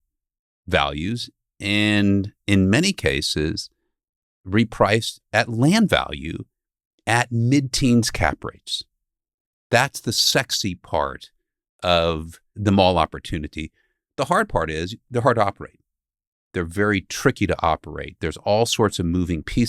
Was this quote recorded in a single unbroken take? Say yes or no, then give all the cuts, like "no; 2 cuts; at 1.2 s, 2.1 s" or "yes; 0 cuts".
no; 1 cut; at 12.5 s